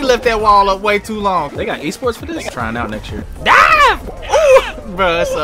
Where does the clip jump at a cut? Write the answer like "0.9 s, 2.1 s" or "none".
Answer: 1.5 s, 3.2 s

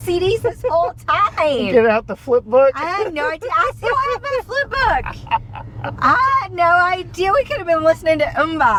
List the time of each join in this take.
none

